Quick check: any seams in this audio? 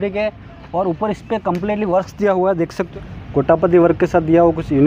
yes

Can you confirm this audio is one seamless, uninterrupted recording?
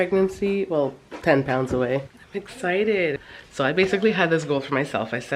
no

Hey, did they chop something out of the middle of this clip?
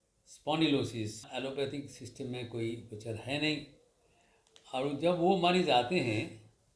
yes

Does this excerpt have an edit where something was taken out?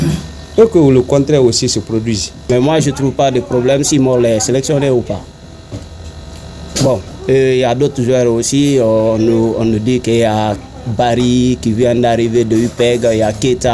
yes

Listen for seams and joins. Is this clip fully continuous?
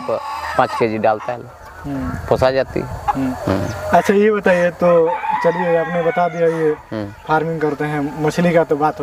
yes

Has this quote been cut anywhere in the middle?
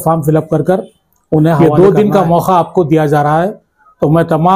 yes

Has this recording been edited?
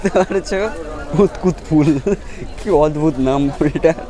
no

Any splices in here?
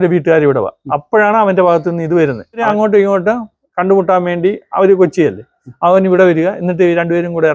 yes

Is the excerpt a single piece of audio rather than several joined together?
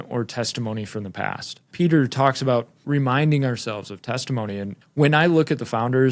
no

